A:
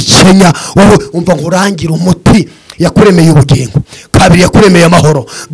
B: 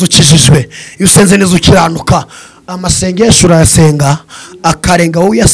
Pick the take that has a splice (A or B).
A